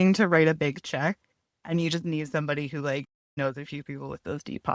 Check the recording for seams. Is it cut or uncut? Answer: cut